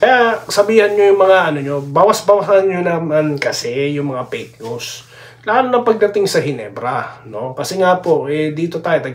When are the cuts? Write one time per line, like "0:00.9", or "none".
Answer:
none